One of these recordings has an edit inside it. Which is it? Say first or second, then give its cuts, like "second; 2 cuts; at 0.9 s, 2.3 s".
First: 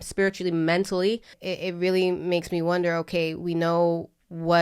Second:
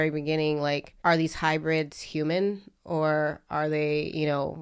first; 1 cut; at 1.3 s